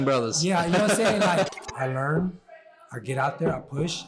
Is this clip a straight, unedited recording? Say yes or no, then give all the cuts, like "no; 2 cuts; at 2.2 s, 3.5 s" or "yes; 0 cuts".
no; 1 cut; at 1.5 s